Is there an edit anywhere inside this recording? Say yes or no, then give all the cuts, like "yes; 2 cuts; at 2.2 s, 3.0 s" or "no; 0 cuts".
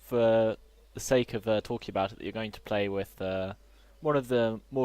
yes; 1 cut; at 1.6 s